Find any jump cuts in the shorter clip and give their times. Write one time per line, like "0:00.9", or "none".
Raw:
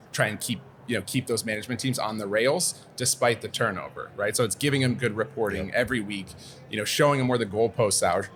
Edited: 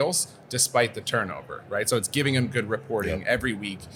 none